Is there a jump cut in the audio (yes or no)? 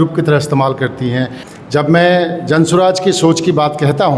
yes